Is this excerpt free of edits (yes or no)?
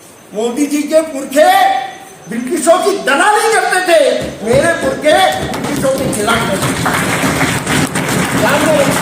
yes